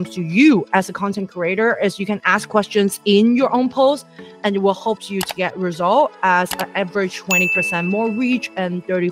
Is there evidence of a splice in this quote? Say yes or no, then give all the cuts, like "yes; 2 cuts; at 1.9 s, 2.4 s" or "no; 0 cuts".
no; 0 cuts